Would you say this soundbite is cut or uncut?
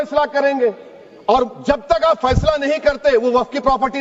uncut